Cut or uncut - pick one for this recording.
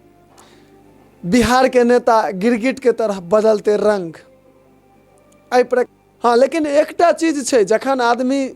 cut